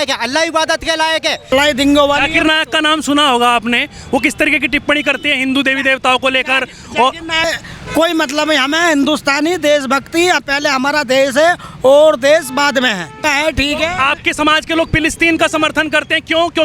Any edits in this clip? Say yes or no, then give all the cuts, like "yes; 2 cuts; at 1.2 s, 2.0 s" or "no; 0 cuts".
yes; 3 cuts; at 1.4 s, 7.4 s, 13.2 s